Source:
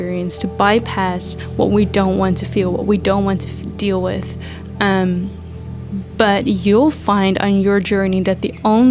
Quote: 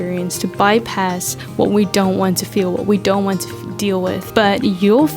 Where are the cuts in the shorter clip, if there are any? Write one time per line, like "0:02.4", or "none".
0:04.2